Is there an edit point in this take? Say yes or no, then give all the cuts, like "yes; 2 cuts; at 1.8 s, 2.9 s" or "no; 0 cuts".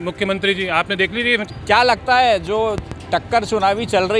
yes; 1 cut; at 1.4 s